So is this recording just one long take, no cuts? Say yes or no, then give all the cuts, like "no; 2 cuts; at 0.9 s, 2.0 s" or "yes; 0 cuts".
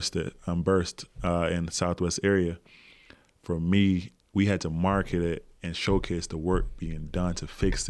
yes; 0 cuts